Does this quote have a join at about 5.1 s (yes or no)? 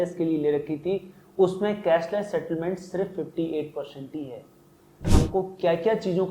yes